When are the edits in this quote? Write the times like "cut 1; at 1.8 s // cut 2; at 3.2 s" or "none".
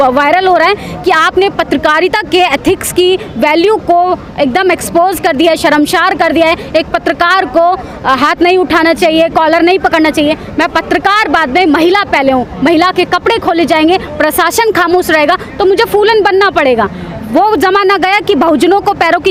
none